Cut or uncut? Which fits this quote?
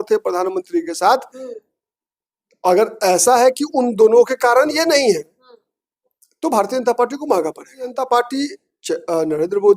cut